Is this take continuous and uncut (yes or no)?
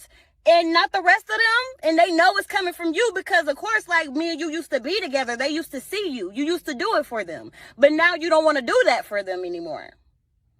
no